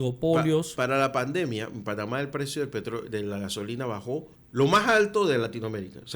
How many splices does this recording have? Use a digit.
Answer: 1